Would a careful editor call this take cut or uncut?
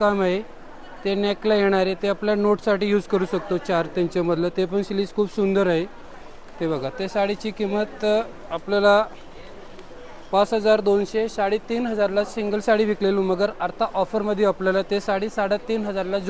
uncut